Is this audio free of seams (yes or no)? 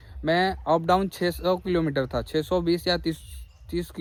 yes